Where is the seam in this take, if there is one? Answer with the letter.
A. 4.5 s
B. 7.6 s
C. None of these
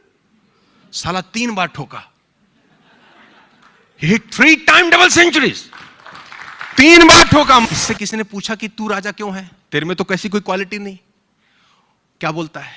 B